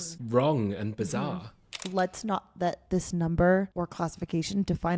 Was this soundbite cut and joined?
yes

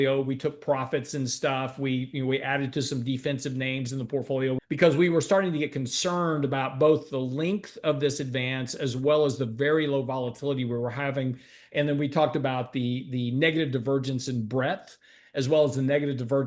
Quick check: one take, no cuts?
no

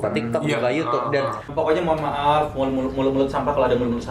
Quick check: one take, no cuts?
no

